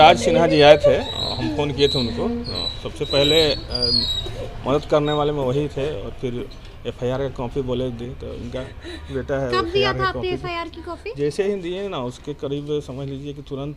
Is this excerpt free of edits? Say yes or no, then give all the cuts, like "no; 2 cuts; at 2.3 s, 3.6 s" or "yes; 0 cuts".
yes; 0 cuts